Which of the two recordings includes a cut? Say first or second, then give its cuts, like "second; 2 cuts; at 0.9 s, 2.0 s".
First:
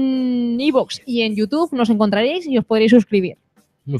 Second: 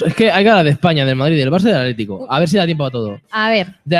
second; 1 cut; at 1.1 s